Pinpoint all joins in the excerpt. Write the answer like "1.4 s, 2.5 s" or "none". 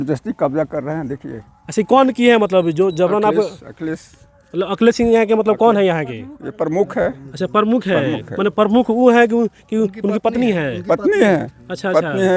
none